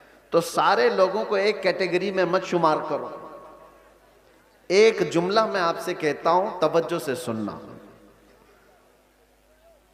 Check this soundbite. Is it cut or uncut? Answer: uncut